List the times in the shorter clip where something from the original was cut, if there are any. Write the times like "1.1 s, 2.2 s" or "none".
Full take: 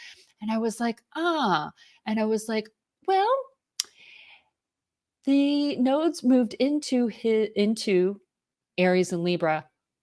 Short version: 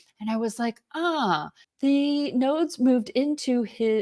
1.6 s